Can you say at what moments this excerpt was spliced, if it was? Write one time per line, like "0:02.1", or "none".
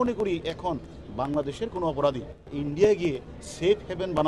0:02.5